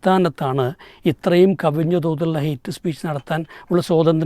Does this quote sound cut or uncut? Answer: uncut